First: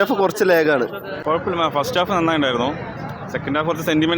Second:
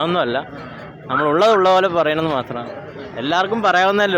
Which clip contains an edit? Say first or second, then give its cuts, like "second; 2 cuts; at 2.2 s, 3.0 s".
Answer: first; 1 cut; at 1.1 s